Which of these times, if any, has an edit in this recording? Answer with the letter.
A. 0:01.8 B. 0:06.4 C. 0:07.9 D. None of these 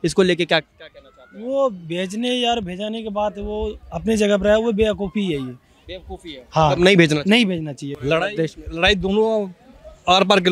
C